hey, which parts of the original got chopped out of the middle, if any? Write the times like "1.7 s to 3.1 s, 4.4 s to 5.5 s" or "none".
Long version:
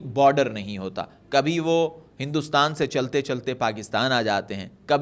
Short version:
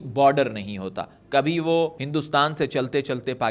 2.0 s to 2.2 s